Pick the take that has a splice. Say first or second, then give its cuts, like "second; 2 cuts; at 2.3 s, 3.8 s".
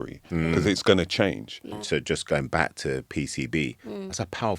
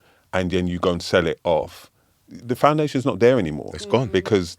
first; 1 cut; at 1.7 s